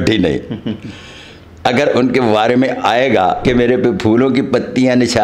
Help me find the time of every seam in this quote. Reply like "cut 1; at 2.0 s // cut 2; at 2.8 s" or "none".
cut 1; at 3.4 s